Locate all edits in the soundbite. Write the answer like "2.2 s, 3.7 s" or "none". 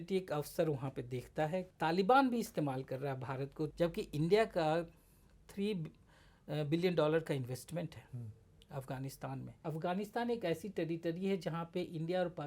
1.7 s, 3.7 s, 9.6 s